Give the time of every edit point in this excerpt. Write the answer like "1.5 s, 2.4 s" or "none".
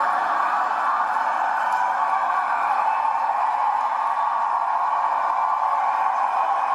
none